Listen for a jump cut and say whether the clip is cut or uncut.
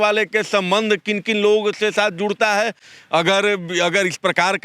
uncut